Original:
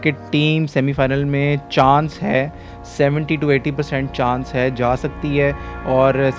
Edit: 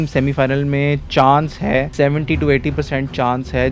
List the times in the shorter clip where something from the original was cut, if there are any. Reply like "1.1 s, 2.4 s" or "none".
1.9 s